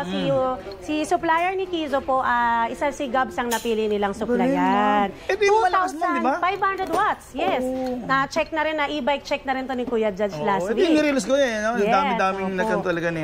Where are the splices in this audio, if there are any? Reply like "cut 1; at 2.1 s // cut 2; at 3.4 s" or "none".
none